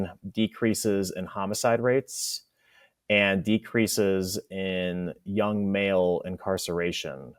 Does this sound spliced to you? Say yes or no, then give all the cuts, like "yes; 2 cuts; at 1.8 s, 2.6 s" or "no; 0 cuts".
no; 0 cuts